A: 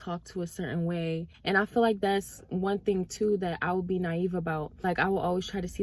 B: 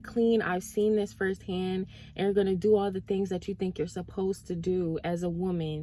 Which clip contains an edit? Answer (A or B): A